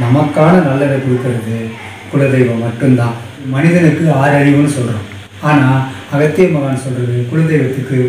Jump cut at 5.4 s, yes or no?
no